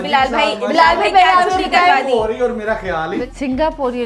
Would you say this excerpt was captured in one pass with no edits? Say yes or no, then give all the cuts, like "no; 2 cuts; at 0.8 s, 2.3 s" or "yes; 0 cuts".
no; 1 cut; at 3.2 s